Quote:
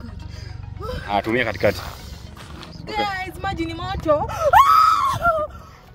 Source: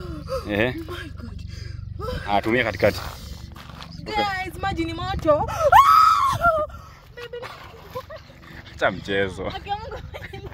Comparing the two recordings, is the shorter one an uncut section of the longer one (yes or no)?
yes